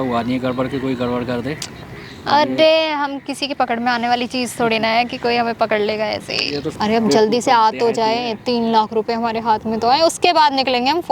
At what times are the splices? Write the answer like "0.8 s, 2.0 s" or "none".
6.6 s